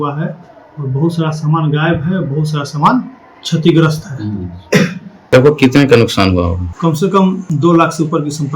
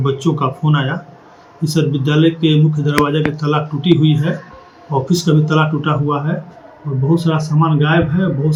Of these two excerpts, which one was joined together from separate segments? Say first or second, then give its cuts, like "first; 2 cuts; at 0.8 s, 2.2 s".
first; 3 cuts; at 5.3 s, 6.7 s, 7.5 s